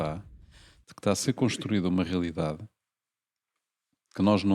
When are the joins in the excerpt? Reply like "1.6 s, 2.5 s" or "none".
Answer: none